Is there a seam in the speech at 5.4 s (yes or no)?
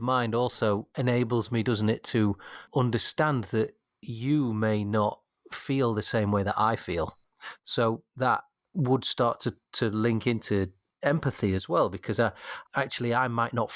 no